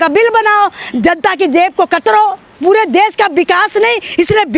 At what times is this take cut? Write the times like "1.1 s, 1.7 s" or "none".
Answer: 2.6 s